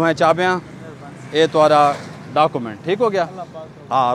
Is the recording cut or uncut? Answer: uncut